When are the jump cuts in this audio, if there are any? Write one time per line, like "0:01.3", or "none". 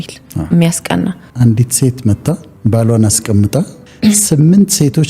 0:01.2
0:02.5